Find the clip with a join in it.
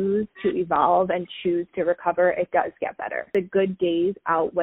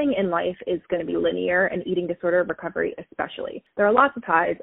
first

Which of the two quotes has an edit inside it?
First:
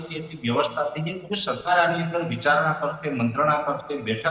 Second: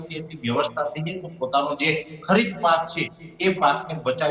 first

